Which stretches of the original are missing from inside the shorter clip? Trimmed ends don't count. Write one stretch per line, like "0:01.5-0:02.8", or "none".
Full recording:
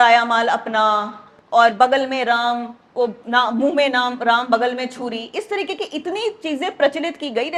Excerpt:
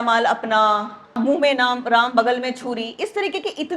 0:01.4-0:03.5